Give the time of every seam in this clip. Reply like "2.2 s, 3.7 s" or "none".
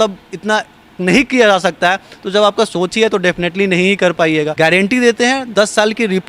4.5 s